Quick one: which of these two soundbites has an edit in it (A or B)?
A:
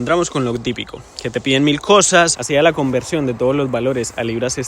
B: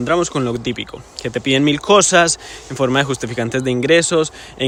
A